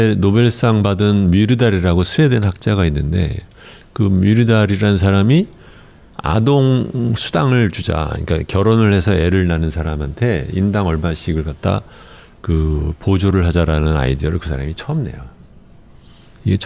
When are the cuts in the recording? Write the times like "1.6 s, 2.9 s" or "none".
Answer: 13.5 s